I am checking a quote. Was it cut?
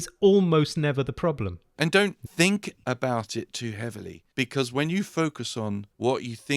yes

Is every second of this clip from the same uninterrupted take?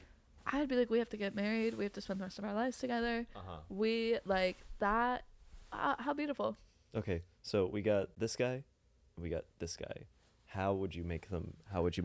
yes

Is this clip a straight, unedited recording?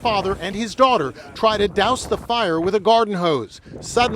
no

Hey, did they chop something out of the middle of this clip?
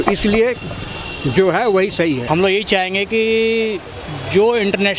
yes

